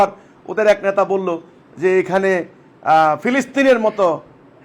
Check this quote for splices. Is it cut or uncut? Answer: uncut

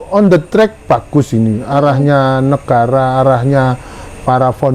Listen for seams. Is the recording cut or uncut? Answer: uncut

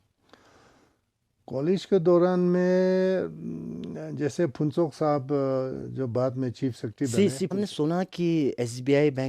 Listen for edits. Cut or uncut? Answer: cut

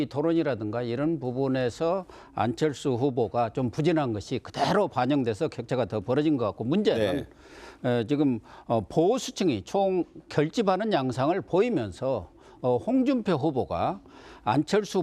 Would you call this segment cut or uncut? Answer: cut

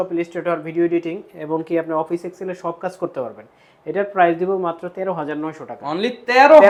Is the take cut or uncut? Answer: uncut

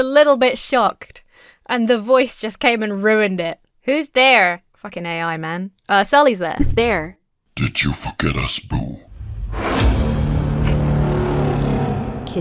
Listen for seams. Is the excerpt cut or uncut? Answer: uncut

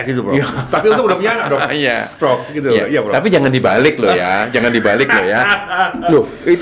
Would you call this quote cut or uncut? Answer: uncut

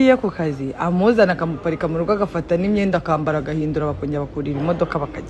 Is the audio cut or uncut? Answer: uncut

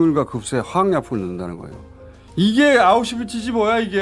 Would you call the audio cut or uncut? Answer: uncut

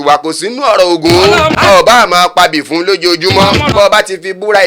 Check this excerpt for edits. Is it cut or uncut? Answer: cut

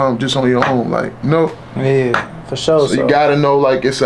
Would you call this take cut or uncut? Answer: uncut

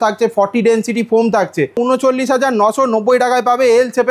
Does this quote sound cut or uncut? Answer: cut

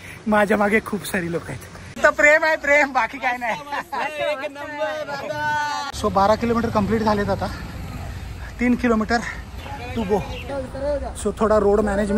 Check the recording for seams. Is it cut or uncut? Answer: cut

